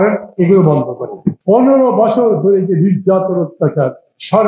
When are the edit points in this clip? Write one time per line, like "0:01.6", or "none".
0:01.3